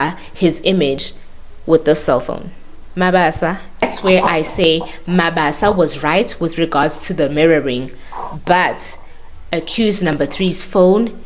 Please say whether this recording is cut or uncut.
cut